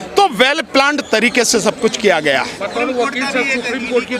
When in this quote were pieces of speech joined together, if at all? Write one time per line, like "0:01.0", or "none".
none